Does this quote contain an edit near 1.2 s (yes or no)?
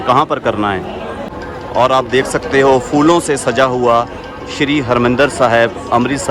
yes